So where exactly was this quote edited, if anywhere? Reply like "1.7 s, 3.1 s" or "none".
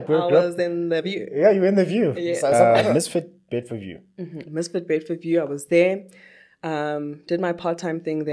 2.5 s